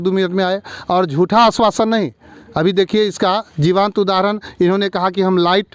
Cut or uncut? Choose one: uncut